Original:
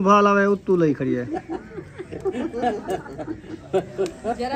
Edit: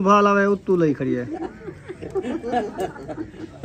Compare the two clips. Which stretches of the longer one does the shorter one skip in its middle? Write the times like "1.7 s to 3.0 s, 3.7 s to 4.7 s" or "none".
1.4 s to 1.5 s